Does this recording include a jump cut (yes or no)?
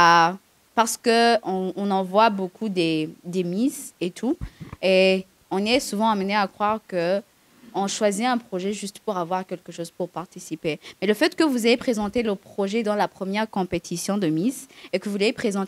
no